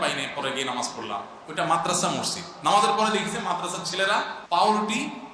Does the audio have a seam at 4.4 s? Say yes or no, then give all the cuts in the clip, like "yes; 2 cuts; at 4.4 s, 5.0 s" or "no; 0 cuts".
yes; 1 cut; at 4.4 s